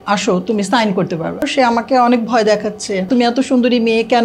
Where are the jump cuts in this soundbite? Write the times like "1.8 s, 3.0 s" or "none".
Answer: 1.5 s, 3.1 s